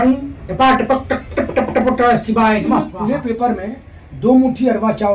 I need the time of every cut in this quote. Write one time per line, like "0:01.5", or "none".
0:02.9